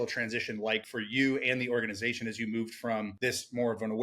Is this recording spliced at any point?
yes; 2 cuts; at 0.9 s, 3.1 s

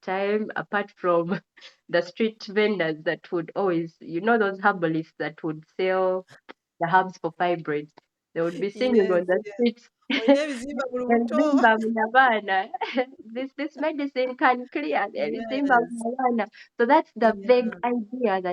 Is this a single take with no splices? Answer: yes; 0 cuts

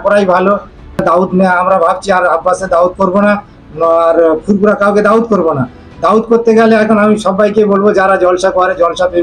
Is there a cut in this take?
yes; 1 cut; at 1.0 s

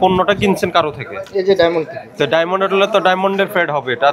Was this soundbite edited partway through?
no; 0 cuts

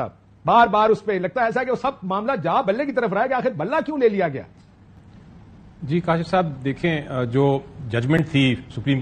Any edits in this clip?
no; 0 cuts

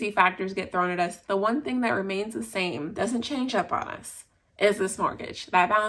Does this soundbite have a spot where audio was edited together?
no; 0 cuts

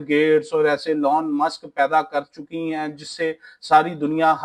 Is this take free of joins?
yes; 0 cuts

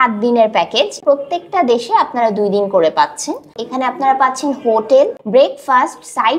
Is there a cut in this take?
yes; 3 cuts; at 1.0 s, 3.5 s, 5.2 s

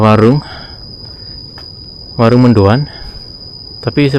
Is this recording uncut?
yes; 0 cuts

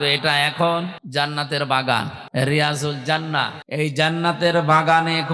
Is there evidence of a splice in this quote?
yes; 3 cuts; at 1.0 s, 2.2 s, 3.6 s

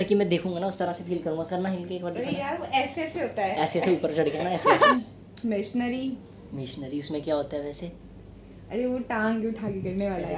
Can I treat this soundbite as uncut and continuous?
no; 1 cut; at 4.9 s

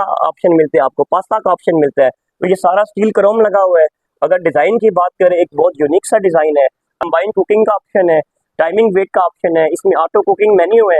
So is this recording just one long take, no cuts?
no; 1 cut; at 7.1 s

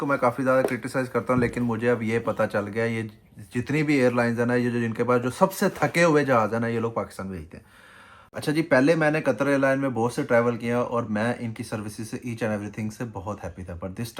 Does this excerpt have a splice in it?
yes; 1 cut; at 8.3 s

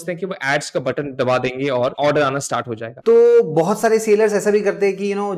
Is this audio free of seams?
no; 2 cuts; at 1.9 s, 2.9 s

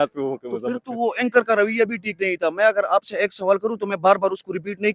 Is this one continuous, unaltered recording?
yes; 0 cuts

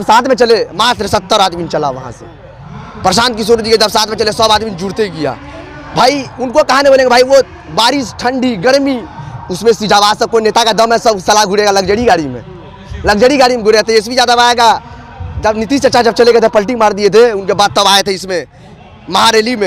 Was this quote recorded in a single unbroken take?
yes; 0 cuts

